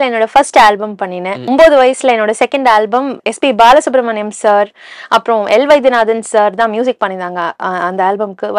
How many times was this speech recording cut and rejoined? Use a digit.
2